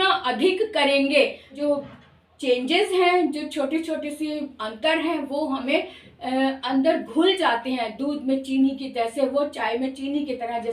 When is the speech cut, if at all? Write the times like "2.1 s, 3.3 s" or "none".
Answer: 1.6 s